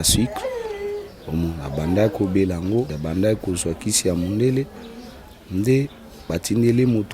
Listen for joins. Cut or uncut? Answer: cut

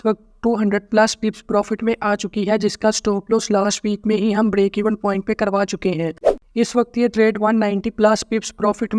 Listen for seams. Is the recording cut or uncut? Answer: cut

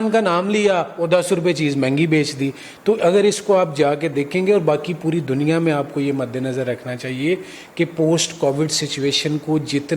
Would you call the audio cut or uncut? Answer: uncut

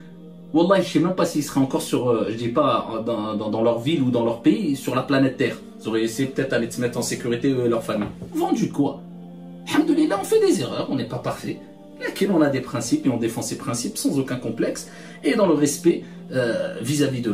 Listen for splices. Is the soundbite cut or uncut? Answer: uncut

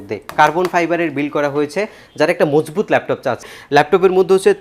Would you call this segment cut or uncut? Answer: cut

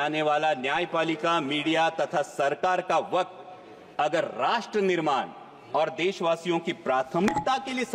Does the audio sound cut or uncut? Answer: uncut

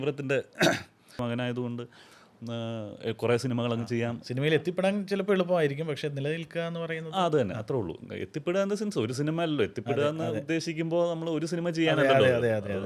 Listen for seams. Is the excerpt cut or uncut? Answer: cut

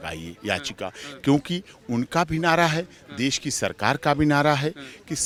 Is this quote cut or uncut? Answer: uncut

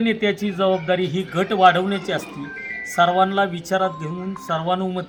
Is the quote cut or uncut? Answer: uncut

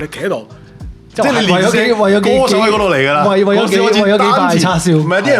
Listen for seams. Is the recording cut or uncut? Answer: uncut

